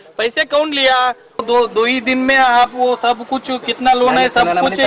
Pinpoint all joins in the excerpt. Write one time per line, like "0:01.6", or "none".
0:01.4